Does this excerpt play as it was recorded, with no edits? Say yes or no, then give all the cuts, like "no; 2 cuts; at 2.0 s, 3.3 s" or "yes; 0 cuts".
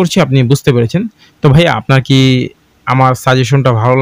yes; 0 cuts